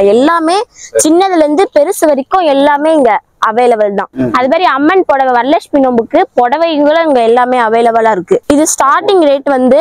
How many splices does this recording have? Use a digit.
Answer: 2